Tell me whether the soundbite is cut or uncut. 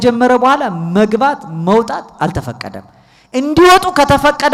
uncut